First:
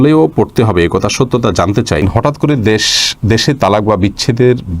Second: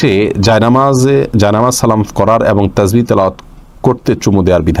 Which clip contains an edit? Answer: first; 1 cut; at 2.0 s

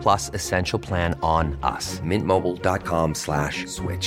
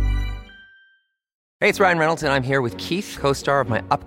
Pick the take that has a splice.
second; 1 cut; at 1.4 s

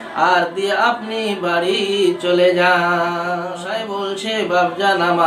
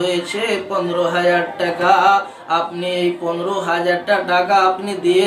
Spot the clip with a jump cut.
first; 1 cut; at 3.7 s

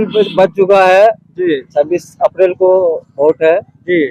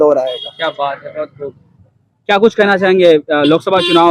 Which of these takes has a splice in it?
second; 1 cut; at 1.7 s

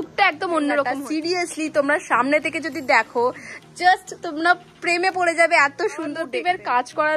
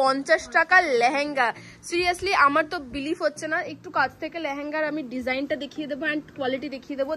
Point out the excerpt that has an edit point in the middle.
first; 2 cuts; at 1.0 s, 6.3 s

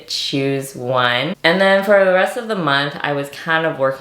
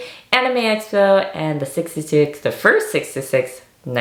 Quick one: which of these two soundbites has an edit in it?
first; 1 cut; at 1.3 s

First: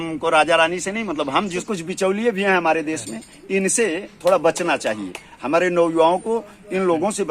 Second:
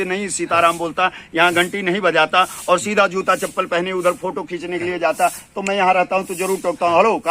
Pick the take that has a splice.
first; 1 cut; at 1.6 s

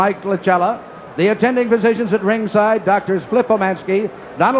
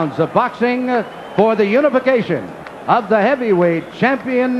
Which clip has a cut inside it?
second; 1 cut; at 1.5 s

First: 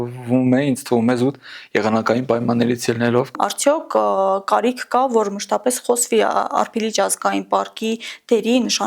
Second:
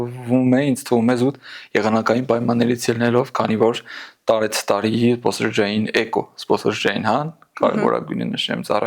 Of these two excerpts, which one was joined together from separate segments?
first; 1 cut; at 3.3 s

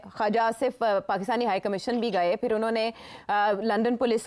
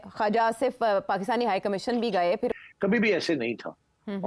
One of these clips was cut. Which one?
second; 1 cut; at 2.5 s

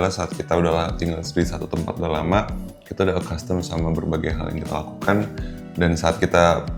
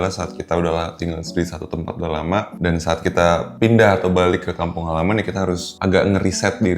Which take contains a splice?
second; 3 cuts; at 2.5 s, 3.5 s, 5.7 s

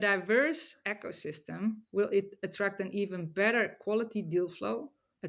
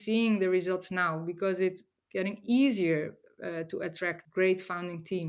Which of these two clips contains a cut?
second; 1 cut; at 4.2 s

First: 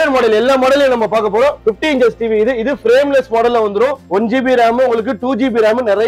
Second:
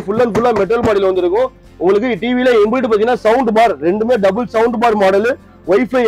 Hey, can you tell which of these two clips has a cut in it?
first; 2 cuts; at 1.6 s, 4.0 s

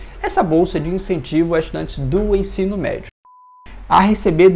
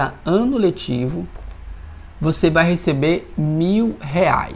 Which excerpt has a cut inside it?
first; 1 cut; at 3.6 s

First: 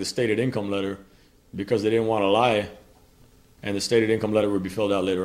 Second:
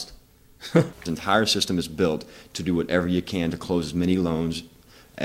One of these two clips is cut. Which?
second; 1 cut; at 1.2 s

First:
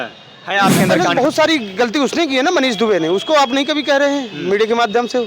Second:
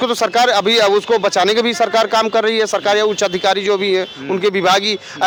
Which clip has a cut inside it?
first; 1 cut; at 1.1 s

